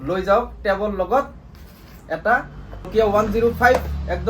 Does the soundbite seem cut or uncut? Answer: cut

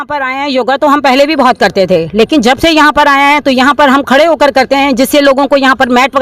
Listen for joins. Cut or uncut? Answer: uncut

